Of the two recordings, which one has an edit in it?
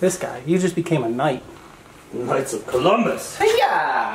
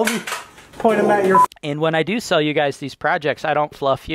second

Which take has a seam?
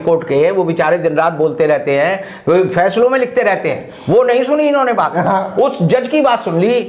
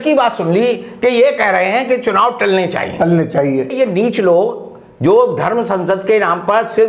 second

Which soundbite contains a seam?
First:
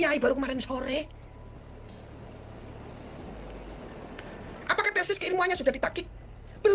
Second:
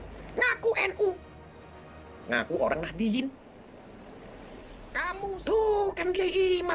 second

